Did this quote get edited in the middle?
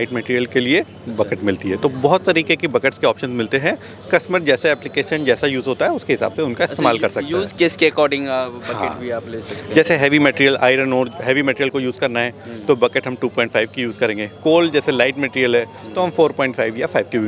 no; 0 cuts

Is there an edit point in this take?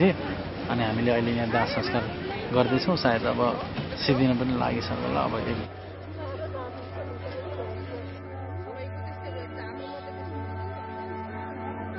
yes; 1 cut; at 10.8 s

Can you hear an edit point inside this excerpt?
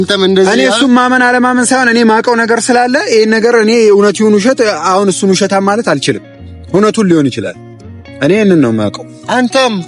no; 0 cuts

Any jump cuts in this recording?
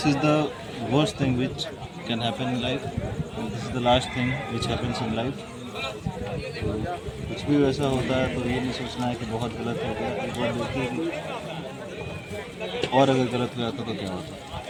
no; 0 cuts

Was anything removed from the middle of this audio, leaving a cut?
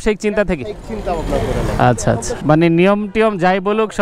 yes; 1 cut; at 2.3 s

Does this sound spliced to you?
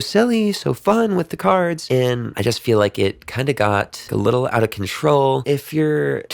yes; 3 cuts; at 2.0 s, 4.0 s, 5.4 s

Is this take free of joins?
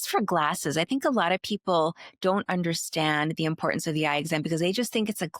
yes; 0 cuts

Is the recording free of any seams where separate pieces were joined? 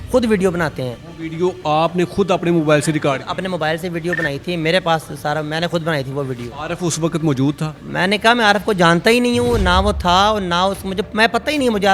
yes; 0 cuts

